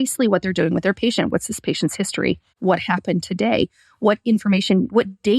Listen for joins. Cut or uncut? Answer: cut